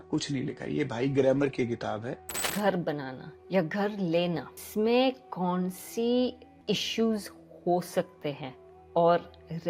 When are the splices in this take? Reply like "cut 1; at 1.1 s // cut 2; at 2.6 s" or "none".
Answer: cut 1; at 2.5 s // cut 2; at 4.6 s // cut 3; at 6.5 s